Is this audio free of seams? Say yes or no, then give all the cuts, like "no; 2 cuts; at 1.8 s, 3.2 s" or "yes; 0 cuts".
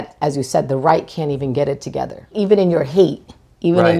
no; 1 cut; at 2.3 s